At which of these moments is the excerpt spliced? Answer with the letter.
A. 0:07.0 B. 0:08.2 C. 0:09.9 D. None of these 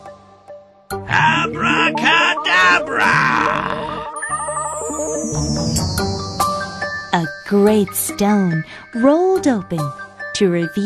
A